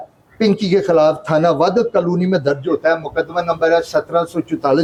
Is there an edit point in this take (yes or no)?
no